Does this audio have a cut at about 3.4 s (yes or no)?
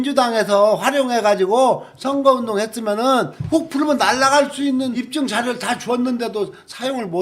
yes